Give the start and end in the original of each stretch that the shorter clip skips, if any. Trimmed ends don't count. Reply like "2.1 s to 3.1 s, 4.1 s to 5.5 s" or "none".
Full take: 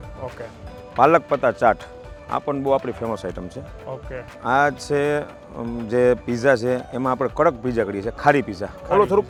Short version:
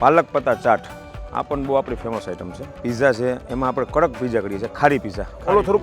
3.8 s to 6.2 s